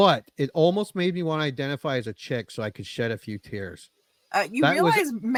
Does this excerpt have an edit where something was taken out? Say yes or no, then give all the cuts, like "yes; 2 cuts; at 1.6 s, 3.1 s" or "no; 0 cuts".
no; 0 cuts